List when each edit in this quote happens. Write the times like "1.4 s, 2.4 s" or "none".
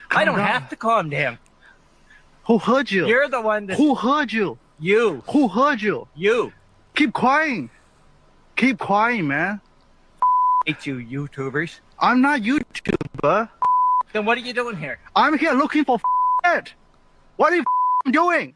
none